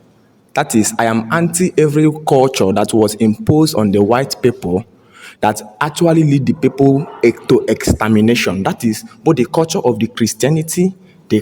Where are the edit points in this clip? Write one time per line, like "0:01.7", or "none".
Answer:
none